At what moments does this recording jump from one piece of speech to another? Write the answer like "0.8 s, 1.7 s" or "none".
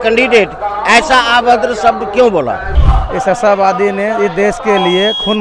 2.8 s